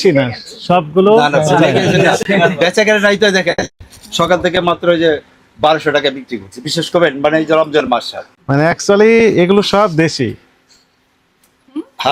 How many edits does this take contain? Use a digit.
0